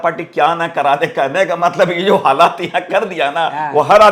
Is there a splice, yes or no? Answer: no